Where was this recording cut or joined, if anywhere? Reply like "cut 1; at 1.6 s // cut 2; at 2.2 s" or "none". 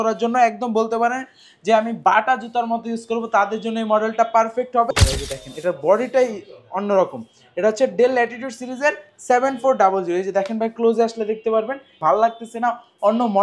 cut 1; at 4.9 s // cut 2; at 11.9 s